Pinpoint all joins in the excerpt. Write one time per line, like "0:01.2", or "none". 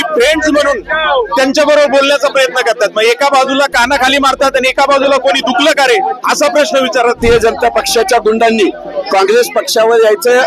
0:07.2